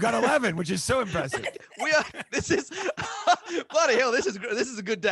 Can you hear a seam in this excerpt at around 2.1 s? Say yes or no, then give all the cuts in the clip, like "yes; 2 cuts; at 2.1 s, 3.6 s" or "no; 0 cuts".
yes; 1 cut; at 2.1 s